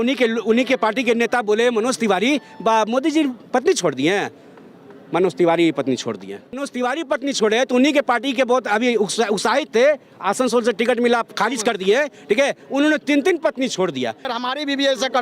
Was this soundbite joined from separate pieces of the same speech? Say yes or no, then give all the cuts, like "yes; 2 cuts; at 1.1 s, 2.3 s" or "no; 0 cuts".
yes; 2 cuts; at 6.6 s, 14.3 s